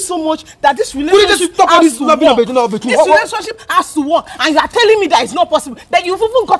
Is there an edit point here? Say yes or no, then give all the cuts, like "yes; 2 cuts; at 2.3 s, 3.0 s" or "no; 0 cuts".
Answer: no; 0 cuts